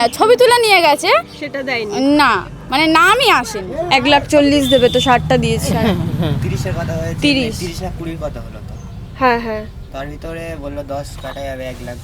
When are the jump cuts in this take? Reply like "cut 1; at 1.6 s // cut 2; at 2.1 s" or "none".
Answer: cut 1; at 3.8 s